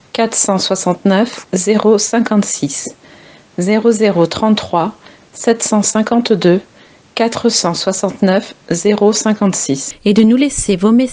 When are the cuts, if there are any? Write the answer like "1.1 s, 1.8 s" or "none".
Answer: 9.9 s